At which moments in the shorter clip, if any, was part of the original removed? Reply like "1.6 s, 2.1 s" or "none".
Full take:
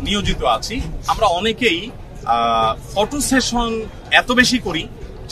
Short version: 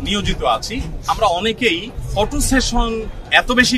2.0 s